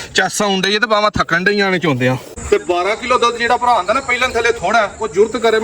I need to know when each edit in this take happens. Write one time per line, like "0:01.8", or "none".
0:02.3